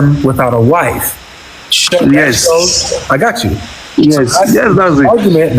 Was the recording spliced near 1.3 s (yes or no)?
no